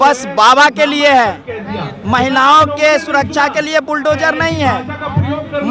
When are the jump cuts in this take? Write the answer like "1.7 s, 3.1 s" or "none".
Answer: none